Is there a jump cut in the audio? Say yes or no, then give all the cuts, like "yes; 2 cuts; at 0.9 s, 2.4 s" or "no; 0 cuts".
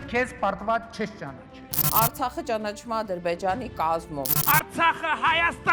no; 0 cuts